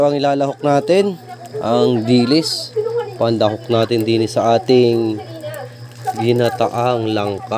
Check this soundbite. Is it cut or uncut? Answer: uncut